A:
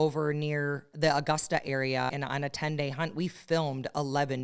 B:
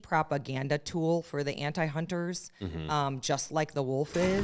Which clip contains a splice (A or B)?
A